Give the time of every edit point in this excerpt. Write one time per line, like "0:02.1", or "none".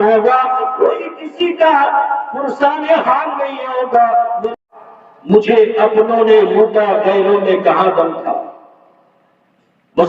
0:04.5